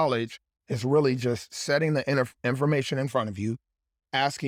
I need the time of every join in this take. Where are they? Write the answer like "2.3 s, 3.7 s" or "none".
none